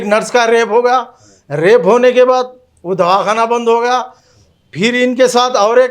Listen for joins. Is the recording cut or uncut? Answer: uncut